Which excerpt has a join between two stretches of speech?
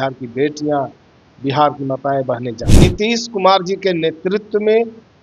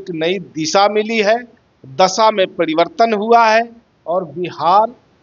first; 1 cut; at 2.6 s

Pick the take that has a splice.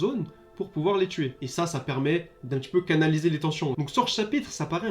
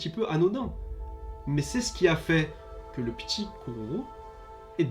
first; 2 cuts; at 1.4 s, 3.8 s

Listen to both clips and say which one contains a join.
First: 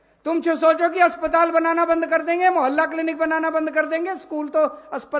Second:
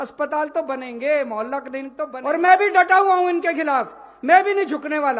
second; 1 cut; at 2.0 s

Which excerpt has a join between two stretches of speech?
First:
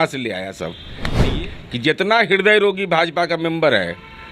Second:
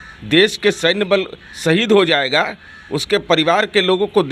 first; 1 cut; at 1.2 s

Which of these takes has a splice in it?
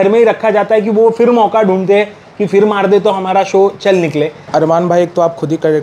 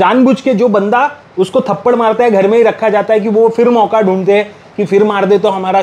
first; 1 cut; at 4.4 s

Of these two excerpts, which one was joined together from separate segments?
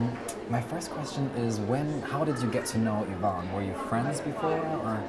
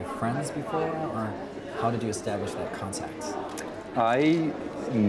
second; 1 cut; at 3.5 s

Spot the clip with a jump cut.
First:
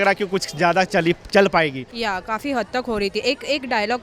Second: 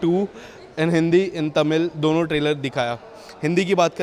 first; 1 cut; at 1.9 s

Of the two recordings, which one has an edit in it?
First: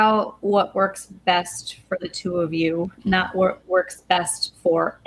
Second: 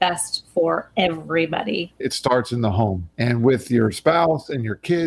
second; 2 cuts; at 2.0 s, 3.1 s

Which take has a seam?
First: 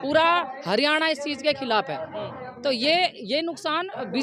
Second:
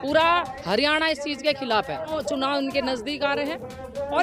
second; 1 cut; at 2.2 s

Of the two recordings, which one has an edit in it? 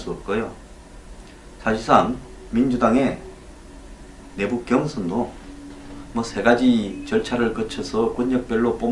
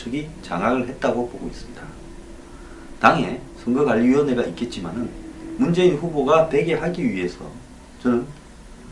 second; 1 cut; at 3.0 s

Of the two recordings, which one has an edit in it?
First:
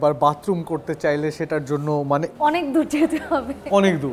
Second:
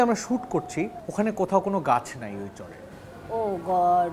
second; 1 cut; at 1.0 s

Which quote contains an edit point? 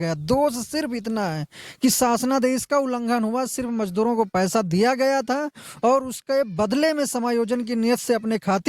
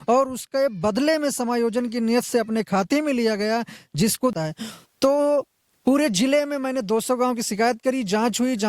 second; 1 cut; at 4.3 s

